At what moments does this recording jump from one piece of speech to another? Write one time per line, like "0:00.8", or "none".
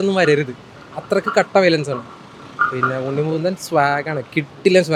none